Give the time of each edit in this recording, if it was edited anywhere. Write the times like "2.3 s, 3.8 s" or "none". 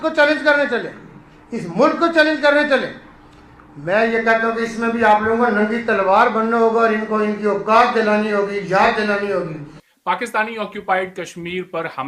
none